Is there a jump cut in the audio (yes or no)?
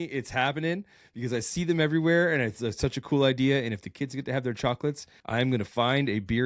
yes